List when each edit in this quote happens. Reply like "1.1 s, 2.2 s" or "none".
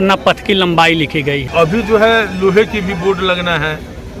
1.4 s